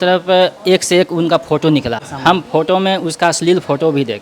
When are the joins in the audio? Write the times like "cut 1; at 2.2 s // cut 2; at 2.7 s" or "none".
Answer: cut 1; at 2.0 s

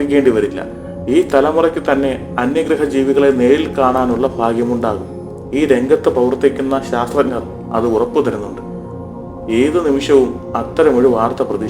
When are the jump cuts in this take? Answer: none

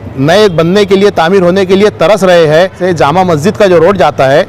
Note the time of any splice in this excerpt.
cut 1; at 2.8 s

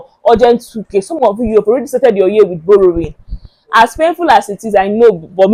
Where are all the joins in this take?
none

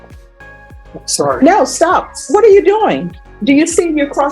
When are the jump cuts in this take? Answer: cut 1; at 0.9 s

